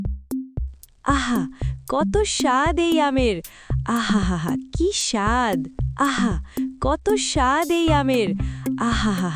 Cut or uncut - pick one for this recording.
uncut